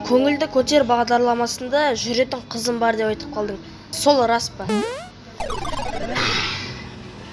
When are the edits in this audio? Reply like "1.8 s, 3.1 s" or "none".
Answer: 3.9 s